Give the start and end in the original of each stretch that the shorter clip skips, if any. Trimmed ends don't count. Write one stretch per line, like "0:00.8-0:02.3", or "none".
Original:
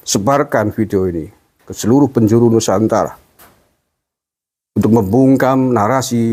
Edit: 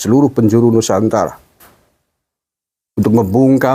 none

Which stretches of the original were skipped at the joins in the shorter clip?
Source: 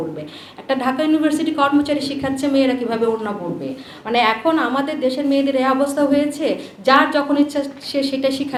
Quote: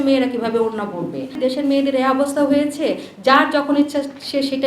0:03.8-0:04.9

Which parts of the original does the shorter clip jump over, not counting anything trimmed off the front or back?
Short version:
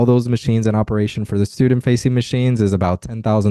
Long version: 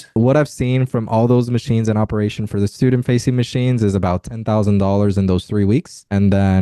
none

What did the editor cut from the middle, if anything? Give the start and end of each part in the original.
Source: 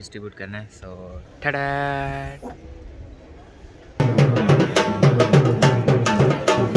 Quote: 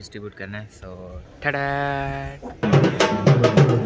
0:02.6-0:04.4

